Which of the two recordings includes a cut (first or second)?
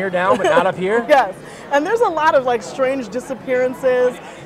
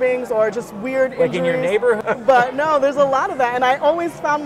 second